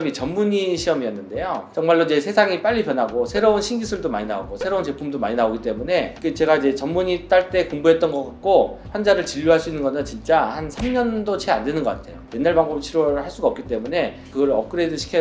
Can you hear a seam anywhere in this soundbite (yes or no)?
yes